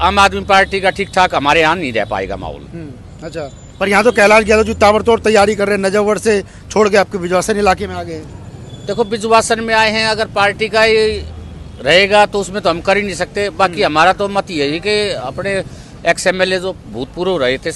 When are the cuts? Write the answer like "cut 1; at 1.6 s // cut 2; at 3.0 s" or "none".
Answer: none